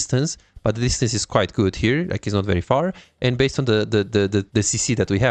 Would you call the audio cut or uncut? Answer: uncut